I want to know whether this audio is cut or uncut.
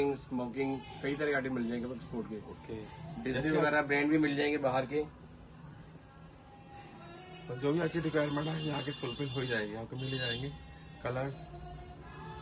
uncut